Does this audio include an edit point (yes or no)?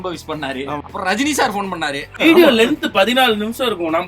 yes